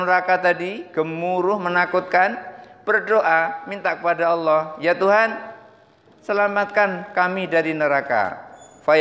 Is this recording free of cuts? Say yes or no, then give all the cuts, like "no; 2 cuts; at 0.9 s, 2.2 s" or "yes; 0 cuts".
yes; 0 cuts